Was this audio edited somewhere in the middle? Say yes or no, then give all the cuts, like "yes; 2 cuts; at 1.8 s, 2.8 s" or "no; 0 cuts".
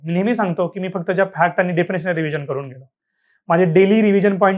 no; 0 cuts